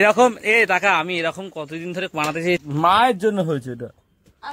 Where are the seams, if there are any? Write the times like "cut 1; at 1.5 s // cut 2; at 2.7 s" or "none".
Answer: cut 1; at 2.6 s